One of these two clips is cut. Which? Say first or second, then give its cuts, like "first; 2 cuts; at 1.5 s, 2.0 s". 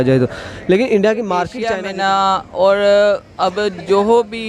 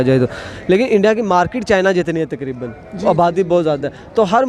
first; 1 cut; at 1.7 s